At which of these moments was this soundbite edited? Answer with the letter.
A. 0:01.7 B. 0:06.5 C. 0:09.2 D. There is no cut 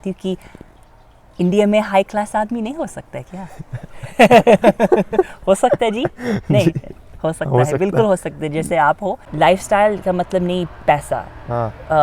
C